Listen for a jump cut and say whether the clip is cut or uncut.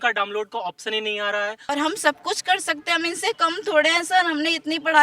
cut